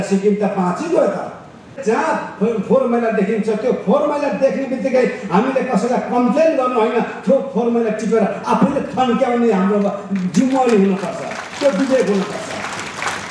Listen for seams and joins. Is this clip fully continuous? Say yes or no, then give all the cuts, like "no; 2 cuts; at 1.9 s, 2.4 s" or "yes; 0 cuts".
no; 1 cut; at 1.8 s